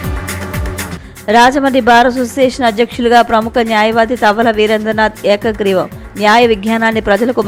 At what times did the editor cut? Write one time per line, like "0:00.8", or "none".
0:00.9